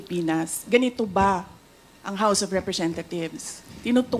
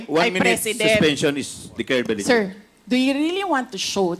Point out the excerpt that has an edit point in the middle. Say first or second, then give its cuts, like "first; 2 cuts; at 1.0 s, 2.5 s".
second; 1 cut; at 2.1 s